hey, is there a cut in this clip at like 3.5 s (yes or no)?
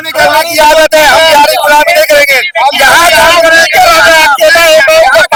no